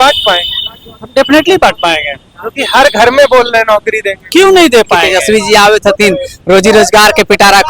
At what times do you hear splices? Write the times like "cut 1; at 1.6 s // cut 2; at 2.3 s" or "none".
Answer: cut 1; at 5.0 s